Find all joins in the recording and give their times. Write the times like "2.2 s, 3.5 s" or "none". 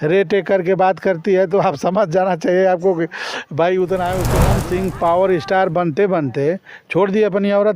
4.4 s